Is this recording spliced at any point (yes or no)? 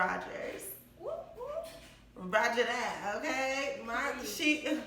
no